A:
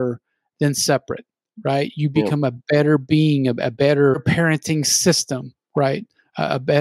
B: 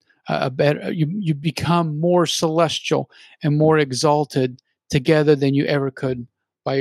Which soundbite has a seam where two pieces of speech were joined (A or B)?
A